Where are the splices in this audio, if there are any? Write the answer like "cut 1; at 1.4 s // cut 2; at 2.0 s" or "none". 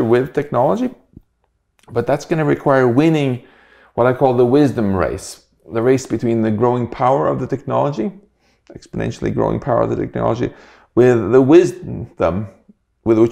none